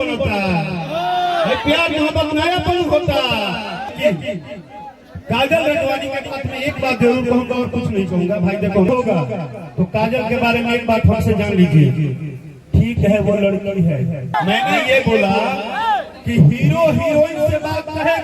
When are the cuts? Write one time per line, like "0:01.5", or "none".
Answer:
0:03.9
0:08.9
0:14.3